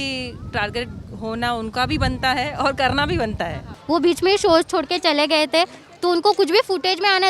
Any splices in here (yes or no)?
yes